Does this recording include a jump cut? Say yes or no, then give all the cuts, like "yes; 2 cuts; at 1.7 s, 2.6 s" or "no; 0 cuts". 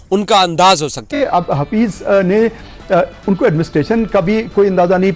yes; 1 cut; at 1.1 s